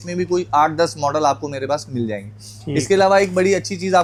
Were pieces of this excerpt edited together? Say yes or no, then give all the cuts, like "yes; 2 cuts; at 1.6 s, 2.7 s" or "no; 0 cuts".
no; 0 cuts